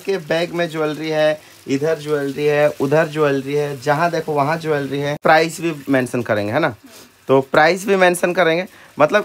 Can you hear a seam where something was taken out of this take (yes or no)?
yes